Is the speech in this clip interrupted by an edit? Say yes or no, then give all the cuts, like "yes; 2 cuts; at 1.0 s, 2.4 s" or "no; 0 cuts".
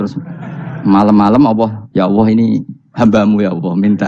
yes; 1 cut; at 1.8 s